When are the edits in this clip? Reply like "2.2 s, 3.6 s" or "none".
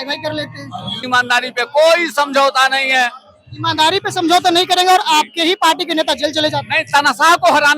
1.0 s